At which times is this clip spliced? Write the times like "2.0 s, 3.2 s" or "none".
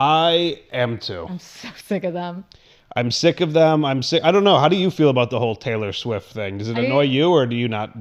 none